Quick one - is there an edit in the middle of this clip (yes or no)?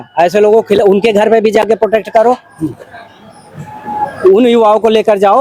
no